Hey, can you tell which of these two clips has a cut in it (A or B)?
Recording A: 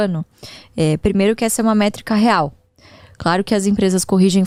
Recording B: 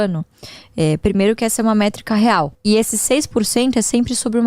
B